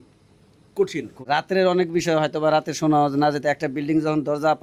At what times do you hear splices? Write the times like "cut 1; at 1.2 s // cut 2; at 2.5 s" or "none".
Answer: cut 1; at 1.2 s